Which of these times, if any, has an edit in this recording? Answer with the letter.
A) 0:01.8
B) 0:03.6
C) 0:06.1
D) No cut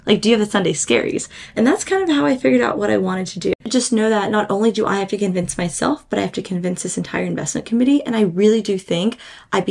B